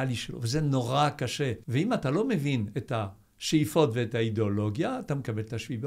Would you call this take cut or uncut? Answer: cut